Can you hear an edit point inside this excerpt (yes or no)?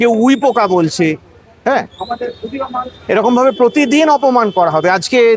no